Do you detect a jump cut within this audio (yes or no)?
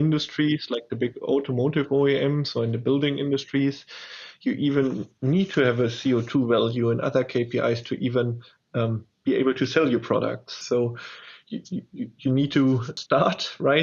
yes